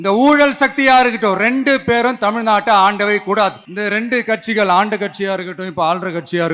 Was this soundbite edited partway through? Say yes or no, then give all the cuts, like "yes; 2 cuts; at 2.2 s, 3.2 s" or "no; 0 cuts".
yes; 1 cut; at 3.7 s